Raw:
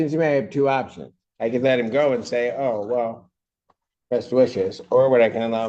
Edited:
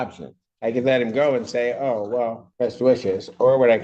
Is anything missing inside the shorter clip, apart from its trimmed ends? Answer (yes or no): yes